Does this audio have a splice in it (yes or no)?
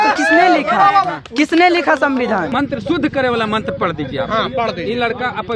yes